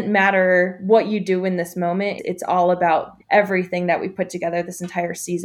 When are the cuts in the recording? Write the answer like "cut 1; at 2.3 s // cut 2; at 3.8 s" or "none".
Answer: cut 1; at 2.2 s // cut 2; at 3.1 s